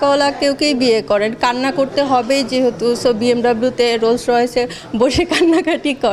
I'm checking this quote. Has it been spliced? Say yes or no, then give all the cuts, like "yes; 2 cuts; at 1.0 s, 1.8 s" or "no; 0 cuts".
no; 0 cuts